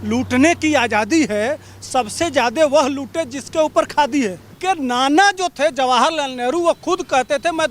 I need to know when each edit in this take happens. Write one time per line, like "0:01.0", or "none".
0:04.6